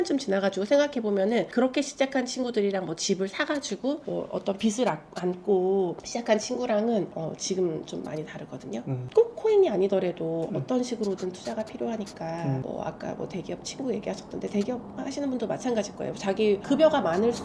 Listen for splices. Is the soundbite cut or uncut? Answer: uncut